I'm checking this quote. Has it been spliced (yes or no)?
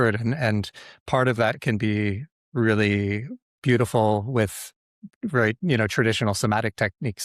no